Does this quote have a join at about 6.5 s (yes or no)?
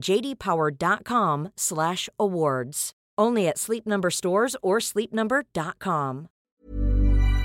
yes